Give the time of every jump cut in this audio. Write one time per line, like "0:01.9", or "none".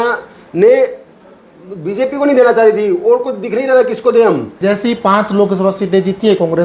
0:04.5